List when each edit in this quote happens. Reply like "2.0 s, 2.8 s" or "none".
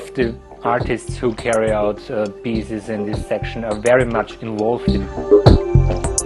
5.0 s